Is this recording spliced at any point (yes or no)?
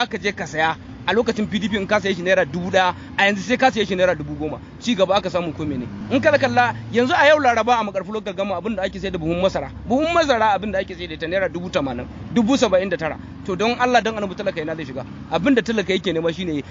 no